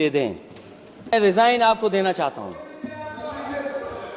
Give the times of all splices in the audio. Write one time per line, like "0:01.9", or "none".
0:01.1